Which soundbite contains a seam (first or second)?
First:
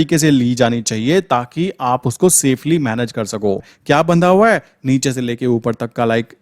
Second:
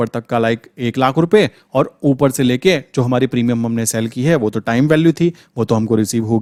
first